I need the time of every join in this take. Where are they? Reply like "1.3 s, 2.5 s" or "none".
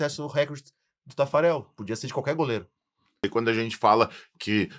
3.2 s